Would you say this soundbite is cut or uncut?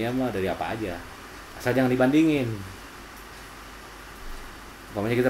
uncut